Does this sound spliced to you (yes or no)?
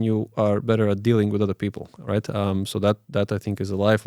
no